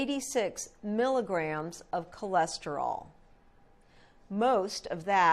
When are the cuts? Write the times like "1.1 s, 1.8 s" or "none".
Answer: 1.8 s